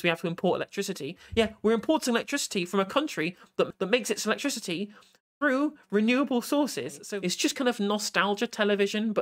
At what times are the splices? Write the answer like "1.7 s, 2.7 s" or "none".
3.7 s, 7.0 s